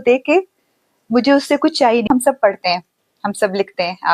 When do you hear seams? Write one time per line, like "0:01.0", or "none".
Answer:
0:02.1